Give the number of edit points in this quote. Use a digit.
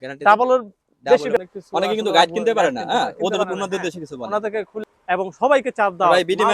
2